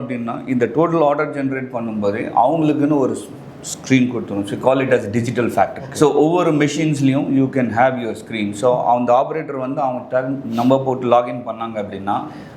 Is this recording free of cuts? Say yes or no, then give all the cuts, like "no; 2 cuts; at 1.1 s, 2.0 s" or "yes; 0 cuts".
no; 1 cut; at 5.8 s